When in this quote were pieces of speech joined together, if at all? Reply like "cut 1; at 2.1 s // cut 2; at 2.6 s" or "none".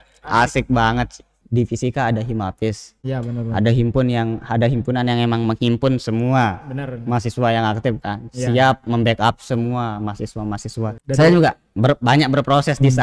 cut 1; at 1.4 s // cut 2; at 11.0 s

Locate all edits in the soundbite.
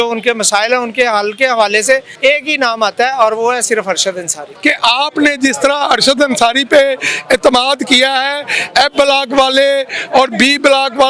cut 1; at 2.1 s // cut 2; at 4.4 s

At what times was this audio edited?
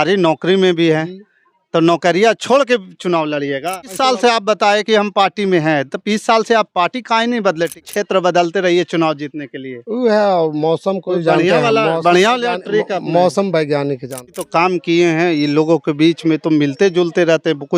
cut 1; at 3.9 s // cut 2; at 7.9 s // cut 3; at 14.4 s

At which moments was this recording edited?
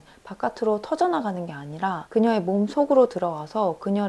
cut 1; at 2.0 s

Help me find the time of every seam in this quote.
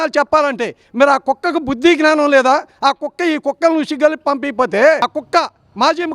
cut 1; at 5.1 s

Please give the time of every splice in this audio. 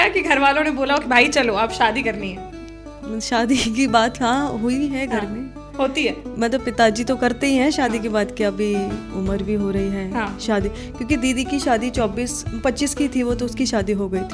none

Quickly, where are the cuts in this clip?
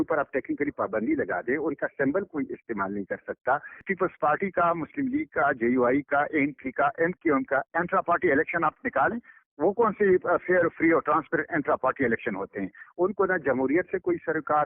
cut 1; at 3.9 s // cut 2; at 12.8 s

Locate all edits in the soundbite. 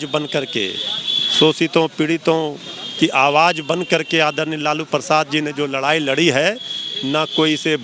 none

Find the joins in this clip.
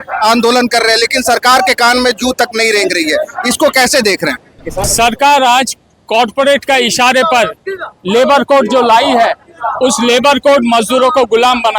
cut 1; at 4.8 s

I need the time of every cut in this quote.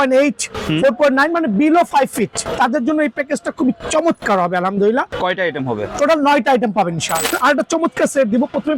cut 1; at 2.4 s // cut 2; at 5.1 s // cut 3; at 7.3 s

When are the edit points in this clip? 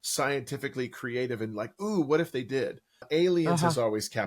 cut 1; at 3.0 s

